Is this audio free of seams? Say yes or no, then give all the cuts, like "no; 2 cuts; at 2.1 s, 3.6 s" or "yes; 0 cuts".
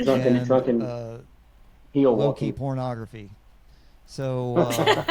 yes; 0 cuts